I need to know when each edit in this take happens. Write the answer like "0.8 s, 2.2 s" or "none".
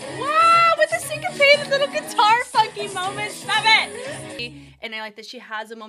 4.4 s